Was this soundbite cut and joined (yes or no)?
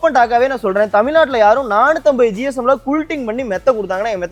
no